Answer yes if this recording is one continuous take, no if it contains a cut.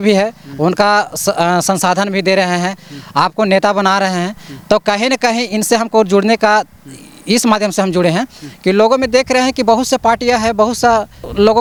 yes